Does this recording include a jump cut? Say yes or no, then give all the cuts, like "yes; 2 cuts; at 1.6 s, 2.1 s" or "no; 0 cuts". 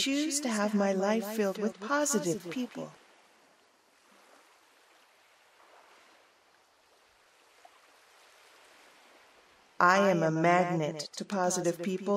yes; 2 cuts; at 3.7 s, 9.8 s